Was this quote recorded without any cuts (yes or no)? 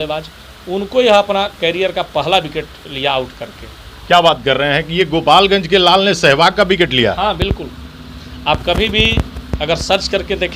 yes